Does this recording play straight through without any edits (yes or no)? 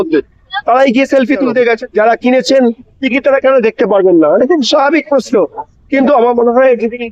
no